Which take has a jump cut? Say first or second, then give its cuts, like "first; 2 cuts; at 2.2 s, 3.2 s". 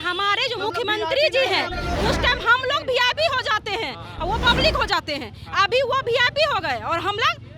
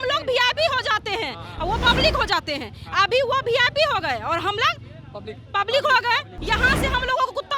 second; 1 cut; at 6.3 s